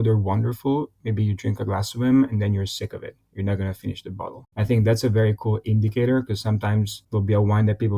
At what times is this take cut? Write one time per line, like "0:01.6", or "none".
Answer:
none